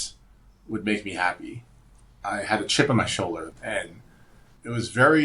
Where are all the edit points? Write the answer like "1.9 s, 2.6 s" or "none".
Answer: 2.1 s, 3.5 s